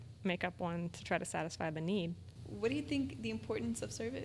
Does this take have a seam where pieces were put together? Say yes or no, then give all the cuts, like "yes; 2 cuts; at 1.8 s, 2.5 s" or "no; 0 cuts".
yes; 1 cut; at 2.3 s